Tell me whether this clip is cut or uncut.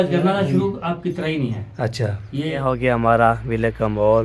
cut